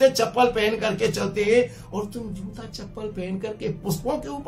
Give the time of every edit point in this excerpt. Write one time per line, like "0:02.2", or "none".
none